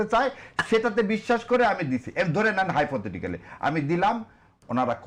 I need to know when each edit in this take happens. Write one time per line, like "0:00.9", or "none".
none